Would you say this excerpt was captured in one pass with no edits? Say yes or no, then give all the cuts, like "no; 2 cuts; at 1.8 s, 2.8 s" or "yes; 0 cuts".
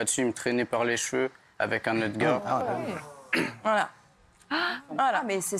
no; 1 cut; at 2.4 s